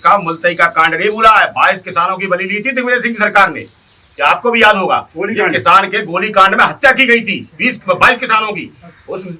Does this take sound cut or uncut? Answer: uncut